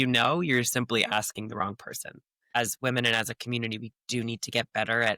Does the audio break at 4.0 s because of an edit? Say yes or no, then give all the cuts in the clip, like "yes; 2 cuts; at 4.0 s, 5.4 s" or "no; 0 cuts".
no; 1 cut; at 2.5 s